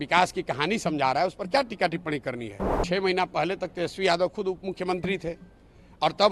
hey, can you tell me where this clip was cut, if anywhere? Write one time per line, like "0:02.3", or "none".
0:02.8